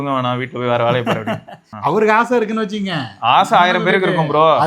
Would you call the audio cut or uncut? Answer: cut